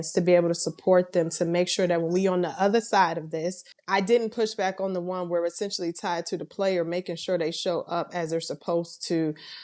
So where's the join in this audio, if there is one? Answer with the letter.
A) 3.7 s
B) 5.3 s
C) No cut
A